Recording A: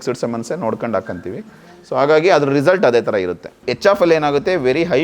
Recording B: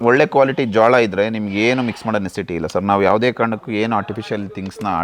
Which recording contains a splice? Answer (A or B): A